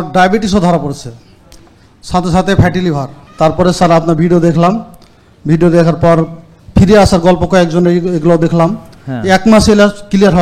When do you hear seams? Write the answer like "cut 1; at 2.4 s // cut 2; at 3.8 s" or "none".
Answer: cut 1; at 3.2 s